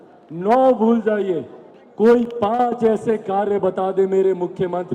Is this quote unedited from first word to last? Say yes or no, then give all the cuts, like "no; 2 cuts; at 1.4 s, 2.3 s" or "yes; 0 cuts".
yes; 0 cuts